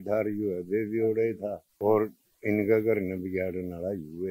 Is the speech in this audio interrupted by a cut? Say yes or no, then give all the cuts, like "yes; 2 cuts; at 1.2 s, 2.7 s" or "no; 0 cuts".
yes; 1 cut; at 1.7 s